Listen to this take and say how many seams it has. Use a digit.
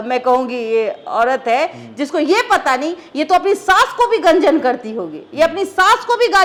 0